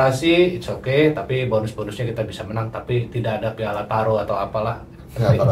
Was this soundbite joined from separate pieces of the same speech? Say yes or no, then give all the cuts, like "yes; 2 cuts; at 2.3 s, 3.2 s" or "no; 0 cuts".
no; 0 cuts